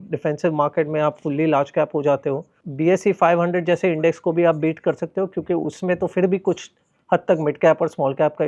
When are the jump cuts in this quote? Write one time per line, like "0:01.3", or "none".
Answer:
none